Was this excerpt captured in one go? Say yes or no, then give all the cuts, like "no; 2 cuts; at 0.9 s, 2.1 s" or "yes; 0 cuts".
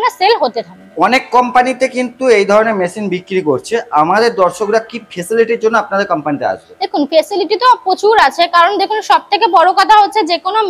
yes; 0 cuts